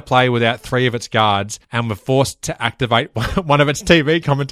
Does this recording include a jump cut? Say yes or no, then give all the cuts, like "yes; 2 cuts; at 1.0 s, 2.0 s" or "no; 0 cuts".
yes; 1 cut; at 1.6 s